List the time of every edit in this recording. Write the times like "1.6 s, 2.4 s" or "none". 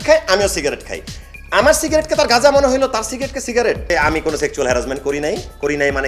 3.9 s